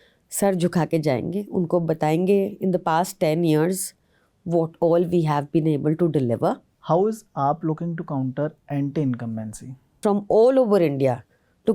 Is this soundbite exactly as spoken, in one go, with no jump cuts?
no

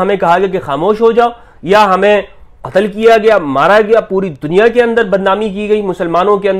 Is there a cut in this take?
no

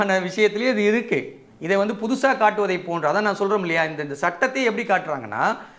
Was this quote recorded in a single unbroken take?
yes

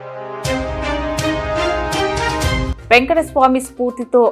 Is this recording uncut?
no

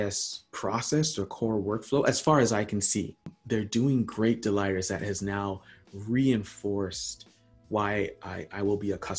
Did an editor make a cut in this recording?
yes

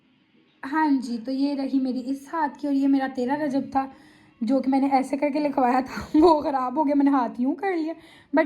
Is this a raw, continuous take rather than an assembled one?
yes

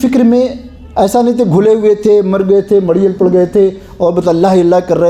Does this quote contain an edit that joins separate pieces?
no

